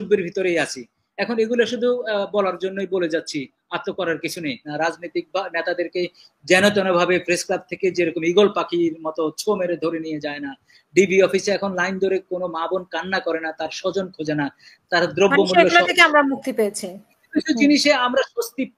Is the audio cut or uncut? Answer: cut